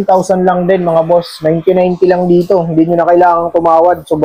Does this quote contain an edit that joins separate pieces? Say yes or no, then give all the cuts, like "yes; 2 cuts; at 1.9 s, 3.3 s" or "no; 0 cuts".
no; 0 cuts